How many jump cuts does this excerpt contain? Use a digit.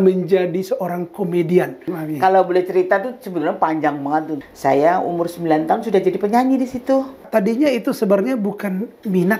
2